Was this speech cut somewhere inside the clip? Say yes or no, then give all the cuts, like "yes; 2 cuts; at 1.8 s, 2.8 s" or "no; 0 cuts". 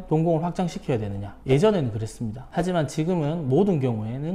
no; 0 cuts